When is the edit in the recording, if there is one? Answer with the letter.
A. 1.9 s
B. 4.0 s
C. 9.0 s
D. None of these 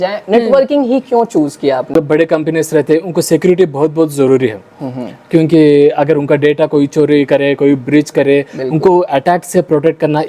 A